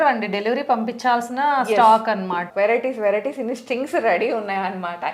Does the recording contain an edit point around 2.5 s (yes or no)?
yes